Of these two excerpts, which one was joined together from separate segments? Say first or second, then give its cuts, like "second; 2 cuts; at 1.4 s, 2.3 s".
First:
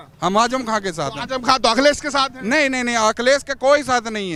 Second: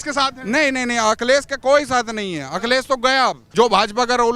second; 1 cut; at 3.4 s